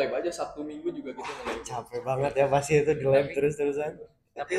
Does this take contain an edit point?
no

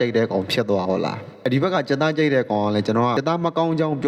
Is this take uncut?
no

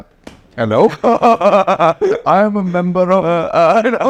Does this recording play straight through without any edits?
yes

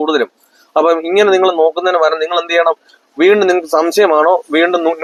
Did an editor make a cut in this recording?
no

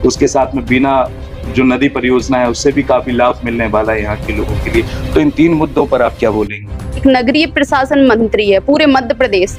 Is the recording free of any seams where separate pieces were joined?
no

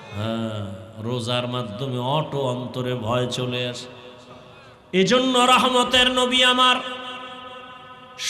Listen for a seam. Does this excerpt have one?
yes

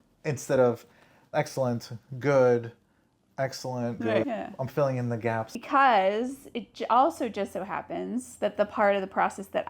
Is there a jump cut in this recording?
yes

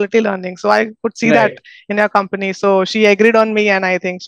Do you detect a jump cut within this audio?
no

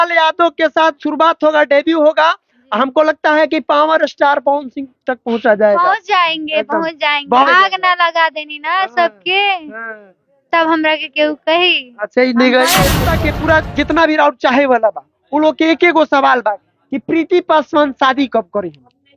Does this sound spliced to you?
yes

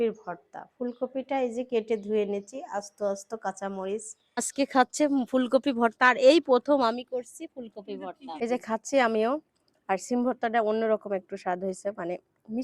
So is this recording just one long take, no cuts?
no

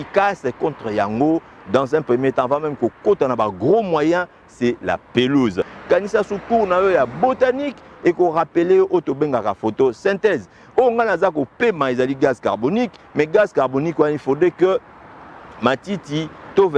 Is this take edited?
yes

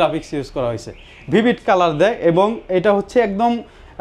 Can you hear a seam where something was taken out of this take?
no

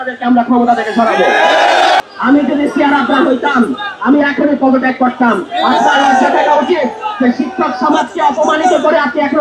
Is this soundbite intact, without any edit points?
no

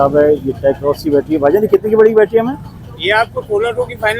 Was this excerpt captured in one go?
yes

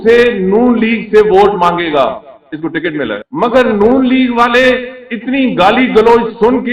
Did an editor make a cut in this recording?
yes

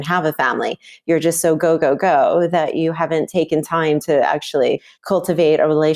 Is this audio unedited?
no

